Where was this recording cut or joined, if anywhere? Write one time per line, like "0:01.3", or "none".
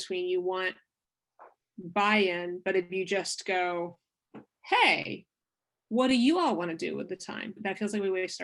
0:07.6